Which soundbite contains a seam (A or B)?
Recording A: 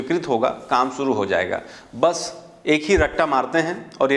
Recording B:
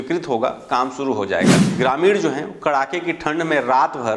B